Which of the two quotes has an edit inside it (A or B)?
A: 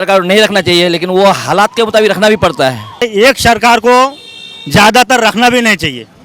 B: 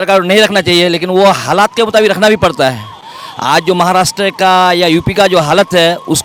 A